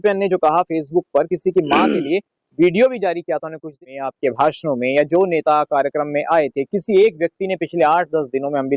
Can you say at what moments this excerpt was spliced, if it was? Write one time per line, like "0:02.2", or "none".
0:03.7